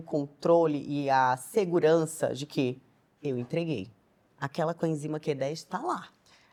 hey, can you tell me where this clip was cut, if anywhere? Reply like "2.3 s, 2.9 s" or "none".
none